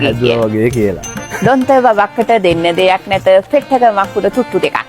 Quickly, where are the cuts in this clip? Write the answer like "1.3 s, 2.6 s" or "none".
1.3 s